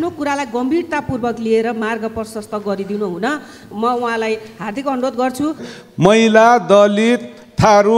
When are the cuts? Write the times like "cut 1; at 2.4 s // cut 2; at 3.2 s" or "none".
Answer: cut 1; at 5.7 s